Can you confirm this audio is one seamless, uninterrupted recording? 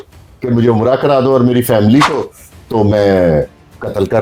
yes; 0 cuts

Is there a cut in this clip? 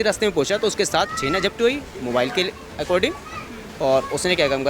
no; 0 cuts

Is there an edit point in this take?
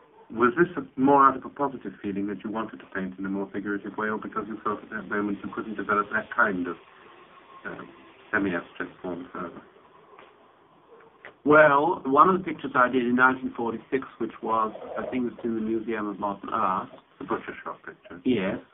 yes; 1 cut; at 16.2 s

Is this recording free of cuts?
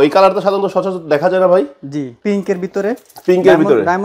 no; 1 cut; at 2.1 s

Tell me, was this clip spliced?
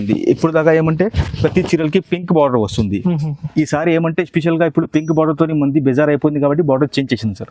no; 0 cuts

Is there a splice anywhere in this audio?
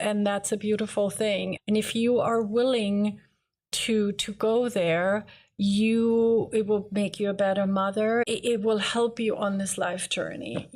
yes; 2 cuts; at 1.6 s, 8.2 s

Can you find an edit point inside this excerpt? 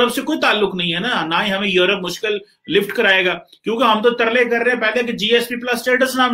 no; 0 cuts

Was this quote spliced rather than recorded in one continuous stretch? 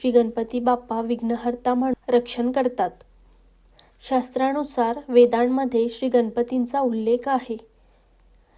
yes; 1 cut; at 1.9 s

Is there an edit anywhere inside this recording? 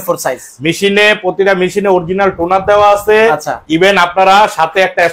no; 0 cuts

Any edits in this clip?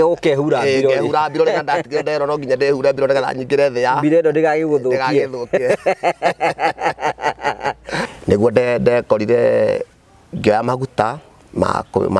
yes; 1 cut; at 8.1 s

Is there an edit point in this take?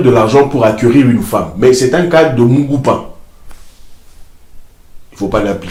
no; 0 cuts

